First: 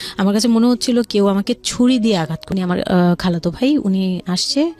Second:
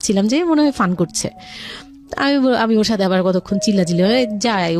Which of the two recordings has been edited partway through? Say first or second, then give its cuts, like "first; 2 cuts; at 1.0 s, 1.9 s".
first; 1 cut; at 2.4 s